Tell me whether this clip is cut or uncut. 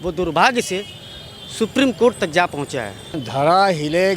cut